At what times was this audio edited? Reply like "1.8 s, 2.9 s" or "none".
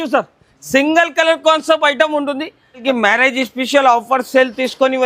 2.8 s